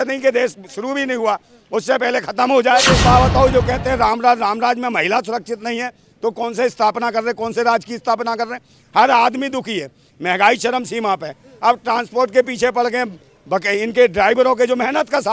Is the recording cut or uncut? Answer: cut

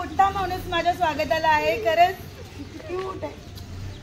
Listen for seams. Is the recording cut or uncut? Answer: uncut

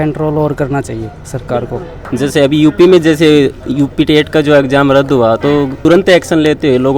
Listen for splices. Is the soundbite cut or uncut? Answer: cut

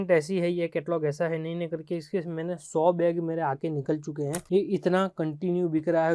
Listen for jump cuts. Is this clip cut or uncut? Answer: uncut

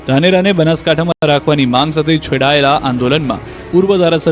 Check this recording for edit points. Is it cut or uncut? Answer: uncut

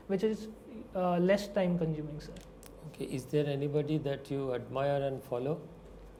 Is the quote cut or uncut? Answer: uncut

